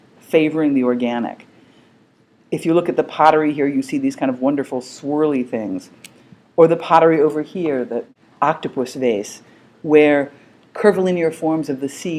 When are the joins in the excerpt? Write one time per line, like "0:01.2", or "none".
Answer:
0:03.9